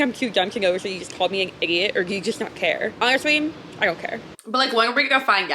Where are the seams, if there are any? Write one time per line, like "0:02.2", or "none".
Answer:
0:02.9
0:04.3